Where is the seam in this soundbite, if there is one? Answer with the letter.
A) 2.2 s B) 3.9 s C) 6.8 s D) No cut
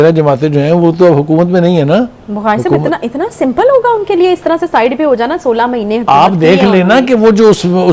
D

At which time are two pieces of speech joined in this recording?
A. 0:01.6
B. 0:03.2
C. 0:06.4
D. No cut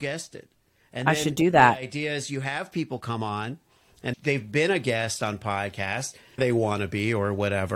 C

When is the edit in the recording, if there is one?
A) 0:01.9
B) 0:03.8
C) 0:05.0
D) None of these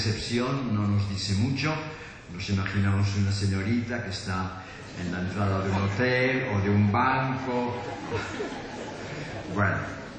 D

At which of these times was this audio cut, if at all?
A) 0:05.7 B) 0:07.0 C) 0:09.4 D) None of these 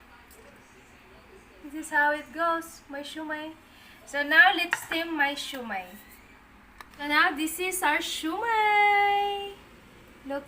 B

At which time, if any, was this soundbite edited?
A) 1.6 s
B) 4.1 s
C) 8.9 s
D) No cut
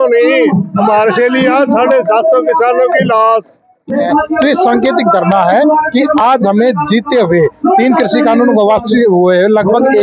B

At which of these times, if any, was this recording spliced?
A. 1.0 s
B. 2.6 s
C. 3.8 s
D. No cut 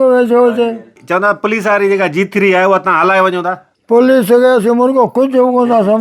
A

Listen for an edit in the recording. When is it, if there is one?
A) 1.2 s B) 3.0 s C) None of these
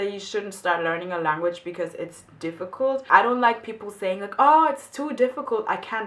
B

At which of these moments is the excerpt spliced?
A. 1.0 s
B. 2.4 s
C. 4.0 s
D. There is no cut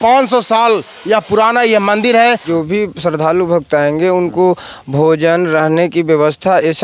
B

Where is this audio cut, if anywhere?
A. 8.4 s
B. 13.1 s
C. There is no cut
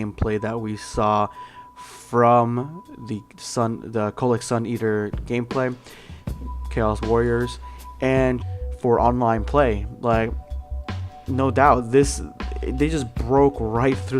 C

